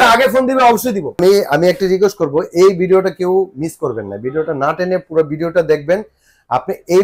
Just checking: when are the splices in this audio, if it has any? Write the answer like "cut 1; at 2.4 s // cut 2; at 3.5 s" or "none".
cut 1; at 1.2 s